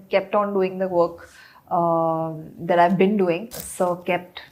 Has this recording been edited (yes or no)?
yes